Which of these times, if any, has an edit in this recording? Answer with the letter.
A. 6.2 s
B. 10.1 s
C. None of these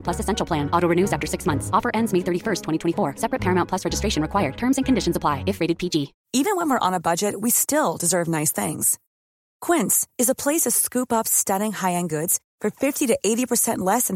A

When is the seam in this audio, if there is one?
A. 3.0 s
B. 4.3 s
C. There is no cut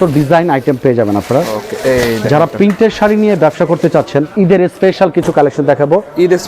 B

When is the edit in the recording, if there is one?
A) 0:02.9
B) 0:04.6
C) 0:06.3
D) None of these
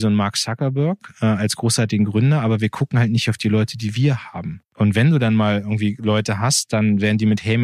B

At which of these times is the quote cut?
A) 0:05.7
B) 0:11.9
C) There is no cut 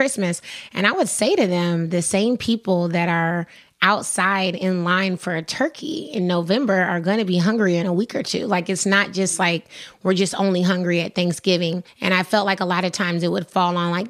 B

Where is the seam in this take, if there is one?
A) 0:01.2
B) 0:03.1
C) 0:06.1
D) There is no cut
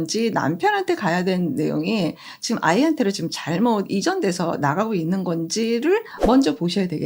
C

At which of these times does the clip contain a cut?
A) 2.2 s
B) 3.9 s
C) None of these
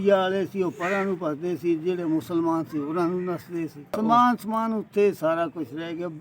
B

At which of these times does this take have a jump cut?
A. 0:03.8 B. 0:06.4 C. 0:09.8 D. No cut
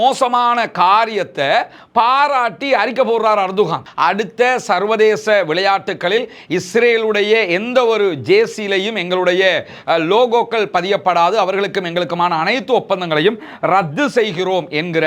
A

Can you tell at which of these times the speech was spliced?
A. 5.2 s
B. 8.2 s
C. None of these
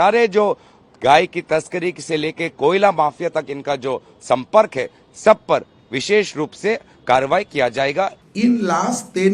B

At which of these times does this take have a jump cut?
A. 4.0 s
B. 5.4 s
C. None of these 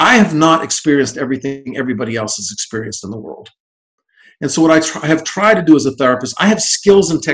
C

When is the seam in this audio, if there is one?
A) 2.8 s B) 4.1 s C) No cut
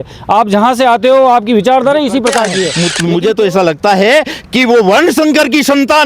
A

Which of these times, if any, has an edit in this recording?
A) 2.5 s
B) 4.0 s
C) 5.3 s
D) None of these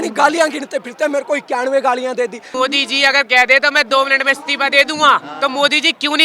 A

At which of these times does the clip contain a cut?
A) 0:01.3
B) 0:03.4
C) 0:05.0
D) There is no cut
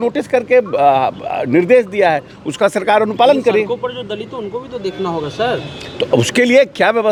D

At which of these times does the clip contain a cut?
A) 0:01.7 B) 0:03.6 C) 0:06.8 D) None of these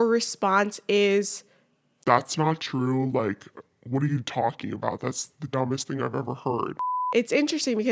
C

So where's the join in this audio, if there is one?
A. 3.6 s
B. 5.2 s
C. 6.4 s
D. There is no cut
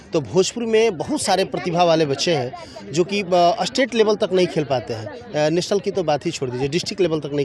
D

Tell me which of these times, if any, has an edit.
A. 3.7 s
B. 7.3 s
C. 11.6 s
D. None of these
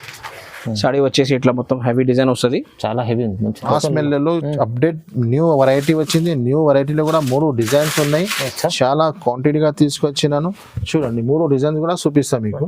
A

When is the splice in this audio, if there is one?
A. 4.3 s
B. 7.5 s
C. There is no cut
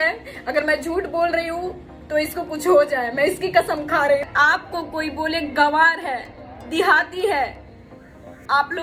A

